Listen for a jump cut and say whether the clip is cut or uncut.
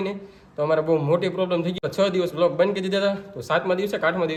uncut